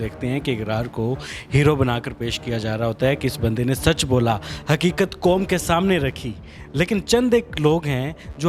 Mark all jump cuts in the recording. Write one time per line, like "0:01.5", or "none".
none